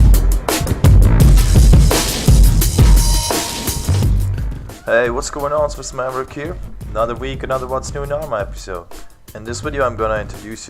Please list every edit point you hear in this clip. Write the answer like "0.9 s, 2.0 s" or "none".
1.0 s

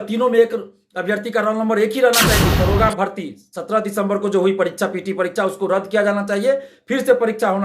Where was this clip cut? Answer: 2.6 s

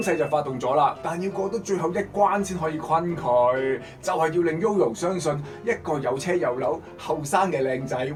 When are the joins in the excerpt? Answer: none

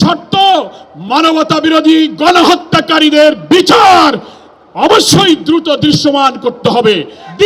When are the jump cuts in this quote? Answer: none

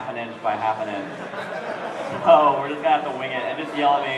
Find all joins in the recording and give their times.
2.4 s

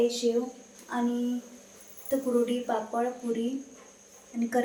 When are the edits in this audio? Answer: none

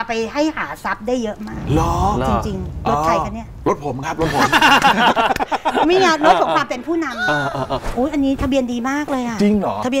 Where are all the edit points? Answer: none

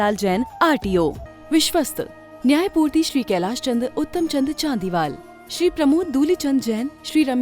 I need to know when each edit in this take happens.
1.3 s

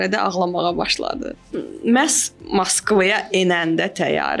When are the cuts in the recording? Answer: 1.3 s

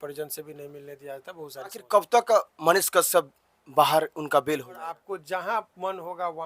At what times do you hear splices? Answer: 1.8 s, 5.0 s

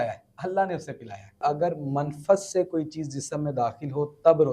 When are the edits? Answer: 1.4 s

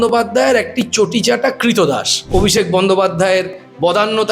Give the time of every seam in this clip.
2.3 s

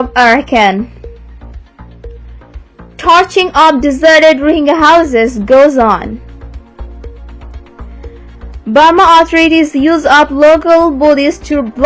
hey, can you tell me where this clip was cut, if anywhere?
6.2 s, 8.2 s

